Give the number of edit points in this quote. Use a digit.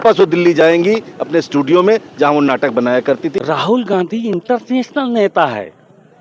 1